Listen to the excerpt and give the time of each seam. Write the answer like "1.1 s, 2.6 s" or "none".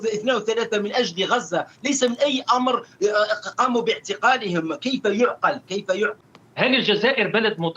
6.2 s